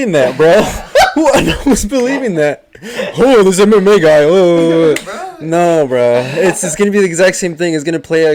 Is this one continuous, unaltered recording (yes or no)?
yes